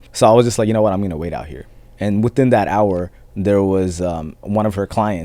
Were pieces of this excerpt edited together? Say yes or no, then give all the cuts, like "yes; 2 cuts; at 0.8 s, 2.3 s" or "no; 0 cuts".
yes; 2 cuts; at 1.8 s, 4.4 s